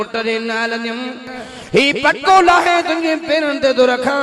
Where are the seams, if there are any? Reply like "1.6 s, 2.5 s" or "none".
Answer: 1.4 s

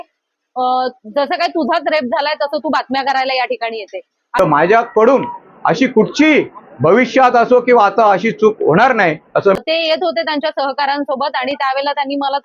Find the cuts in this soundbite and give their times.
4.2 s, 9.6 s

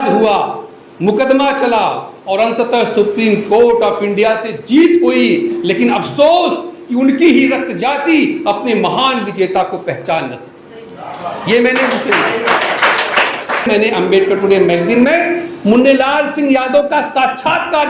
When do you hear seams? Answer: 13.7 s

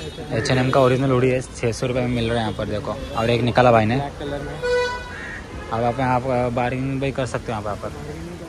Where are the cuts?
none

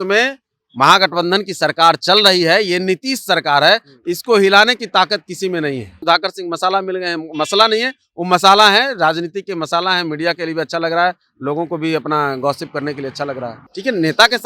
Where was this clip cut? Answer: 5.9 s, 13.6 s

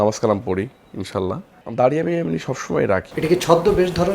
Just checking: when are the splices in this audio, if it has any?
1.6 s, 3.1 s

